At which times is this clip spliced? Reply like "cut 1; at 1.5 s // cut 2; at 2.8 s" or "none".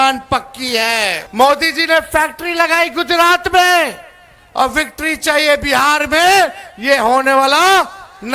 cut 1; at 1.2 s